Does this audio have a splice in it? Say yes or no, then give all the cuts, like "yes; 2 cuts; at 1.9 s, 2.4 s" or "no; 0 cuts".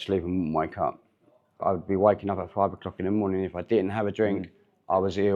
yes; 1 cut; at 1.6 s